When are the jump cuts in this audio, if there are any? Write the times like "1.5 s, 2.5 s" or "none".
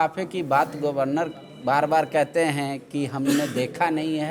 none